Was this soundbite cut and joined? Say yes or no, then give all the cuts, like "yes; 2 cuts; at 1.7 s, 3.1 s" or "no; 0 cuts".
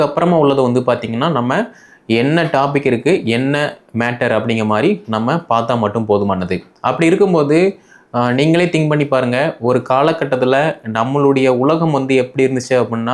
no; 0 cuts